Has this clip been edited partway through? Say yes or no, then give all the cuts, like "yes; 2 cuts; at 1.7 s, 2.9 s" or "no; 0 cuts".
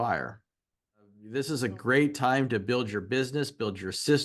yes; 1 cut; at 1.2 s